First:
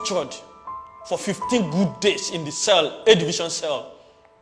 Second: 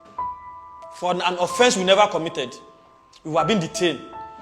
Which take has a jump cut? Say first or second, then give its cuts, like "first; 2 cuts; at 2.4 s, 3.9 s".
second; 1 cut; at 1.0 s